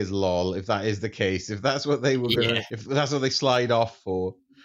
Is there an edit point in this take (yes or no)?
yes